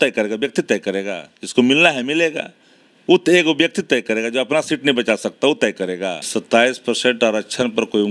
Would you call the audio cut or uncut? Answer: cut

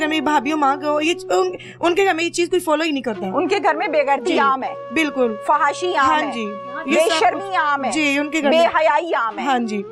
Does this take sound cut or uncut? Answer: uncut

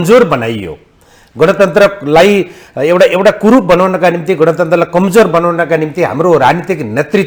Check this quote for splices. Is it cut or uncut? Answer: uncut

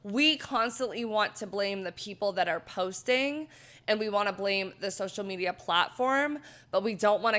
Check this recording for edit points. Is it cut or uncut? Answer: uncut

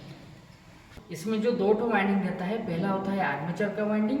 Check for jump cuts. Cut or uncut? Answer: cut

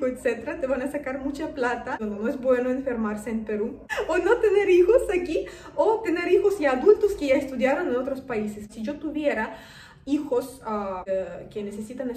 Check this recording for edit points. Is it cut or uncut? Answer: cut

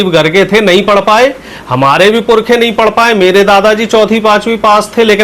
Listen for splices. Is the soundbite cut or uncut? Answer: uncut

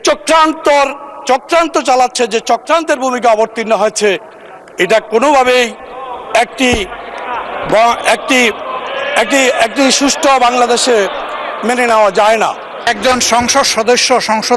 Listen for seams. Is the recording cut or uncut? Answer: cut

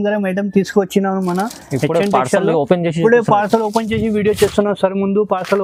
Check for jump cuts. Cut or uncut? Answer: uncut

